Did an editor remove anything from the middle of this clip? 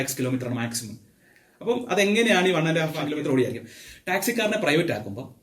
yes; 1 cut; at 3.0 s

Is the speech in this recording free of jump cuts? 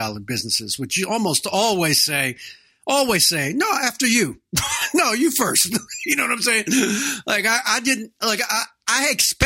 yes; 0 cuts

